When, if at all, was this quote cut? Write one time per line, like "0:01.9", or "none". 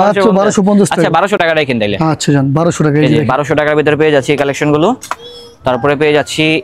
none